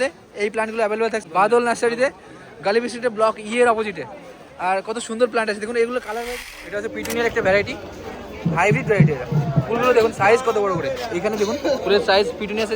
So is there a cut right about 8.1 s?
no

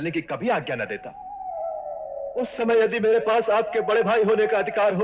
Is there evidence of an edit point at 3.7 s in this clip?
no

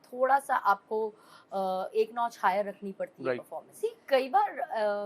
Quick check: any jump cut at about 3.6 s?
yes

